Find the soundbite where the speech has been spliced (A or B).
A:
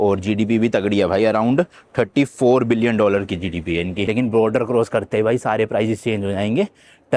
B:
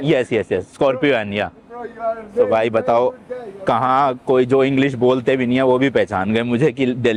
A